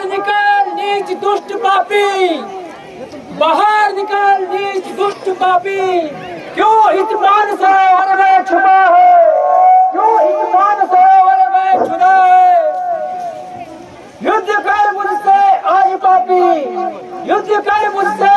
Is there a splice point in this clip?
no; 0 cuts

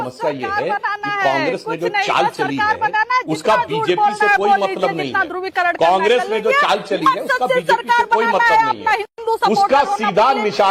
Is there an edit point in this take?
no; 0 cuts

